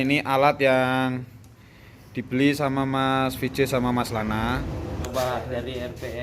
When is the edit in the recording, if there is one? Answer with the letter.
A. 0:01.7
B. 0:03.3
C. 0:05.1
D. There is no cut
C